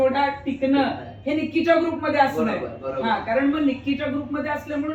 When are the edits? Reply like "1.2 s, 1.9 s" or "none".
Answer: none

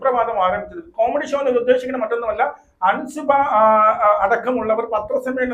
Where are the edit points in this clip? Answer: none

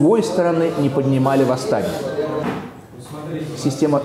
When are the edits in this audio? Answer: 2.4 s

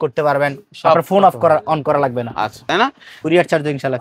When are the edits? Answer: 2.6 s

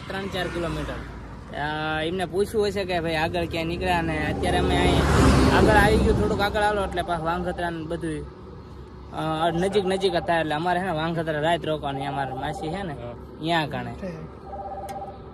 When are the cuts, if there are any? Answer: none

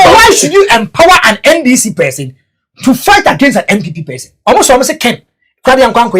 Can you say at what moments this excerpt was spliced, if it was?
4.3 s

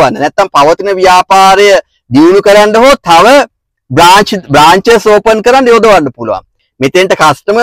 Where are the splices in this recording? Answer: 6.6 s

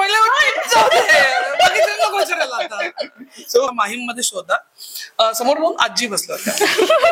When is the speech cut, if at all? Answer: 3.7 s

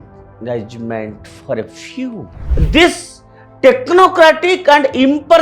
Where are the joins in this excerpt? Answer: 2.4 s

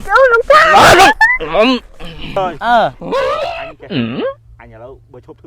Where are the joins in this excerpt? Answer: 2.4 s, 3.0 s, 4.5 s

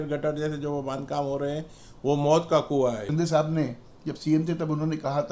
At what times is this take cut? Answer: 3.0 s

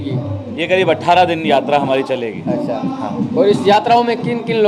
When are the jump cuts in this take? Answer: none

